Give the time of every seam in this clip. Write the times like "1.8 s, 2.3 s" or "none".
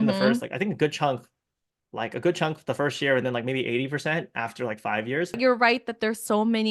5.4 s